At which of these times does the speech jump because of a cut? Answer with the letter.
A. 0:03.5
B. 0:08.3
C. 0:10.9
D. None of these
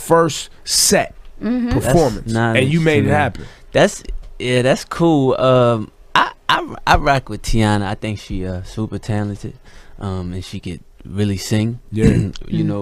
C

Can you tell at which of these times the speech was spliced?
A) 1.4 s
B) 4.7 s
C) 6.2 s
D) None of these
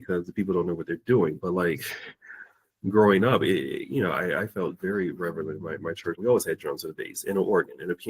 C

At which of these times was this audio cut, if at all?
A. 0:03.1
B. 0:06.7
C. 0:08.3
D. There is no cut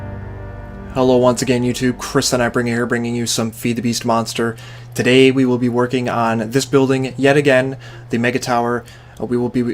C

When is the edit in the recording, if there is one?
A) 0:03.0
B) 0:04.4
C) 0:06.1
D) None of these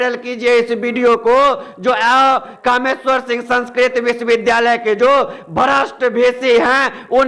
D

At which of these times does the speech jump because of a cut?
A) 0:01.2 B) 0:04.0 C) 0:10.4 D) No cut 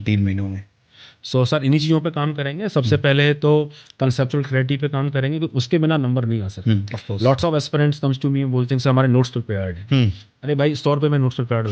D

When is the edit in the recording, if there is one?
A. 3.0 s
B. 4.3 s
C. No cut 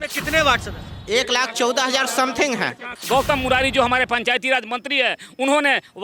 A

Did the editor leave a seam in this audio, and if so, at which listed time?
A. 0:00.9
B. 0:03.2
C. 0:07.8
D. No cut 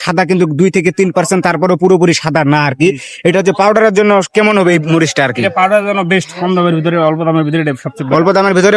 D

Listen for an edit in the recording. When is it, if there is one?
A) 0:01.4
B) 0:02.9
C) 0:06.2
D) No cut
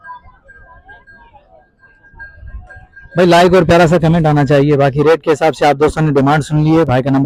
D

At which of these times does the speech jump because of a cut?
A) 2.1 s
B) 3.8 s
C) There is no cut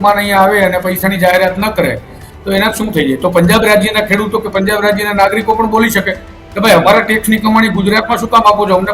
C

